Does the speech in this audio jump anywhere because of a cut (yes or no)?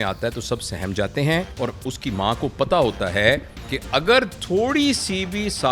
yes